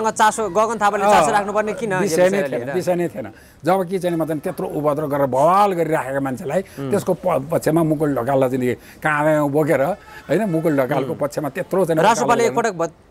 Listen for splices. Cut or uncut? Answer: uncut